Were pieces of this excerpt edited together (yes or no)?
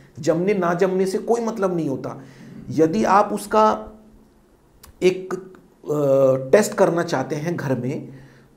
no